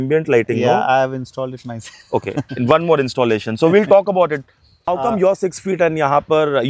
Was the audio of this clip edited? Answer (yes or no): yes